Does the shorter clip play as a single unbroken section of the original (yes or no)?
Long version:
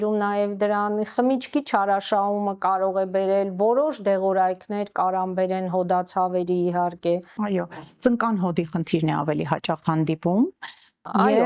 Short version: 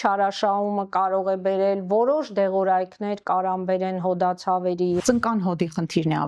no